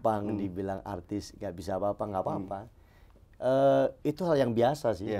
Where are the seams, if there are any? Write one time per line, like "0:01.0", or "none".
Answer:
none